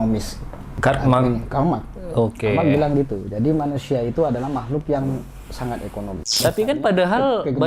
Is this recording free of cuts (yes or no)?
no